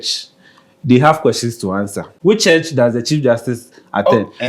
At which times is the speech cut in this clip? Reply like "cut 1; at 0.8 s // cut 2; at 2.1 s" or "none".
cut 1; at 2.0 s